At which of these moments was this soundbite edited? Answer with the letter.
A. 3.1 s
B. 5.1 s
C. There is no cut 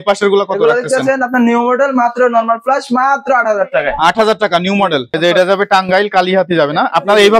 B